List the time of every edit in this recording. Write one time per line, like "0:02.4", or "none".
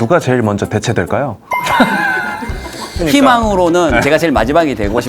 0:03.0